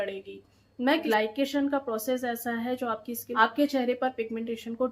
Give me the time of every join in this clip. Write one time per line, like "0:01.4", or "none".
0:01.0
0:03.3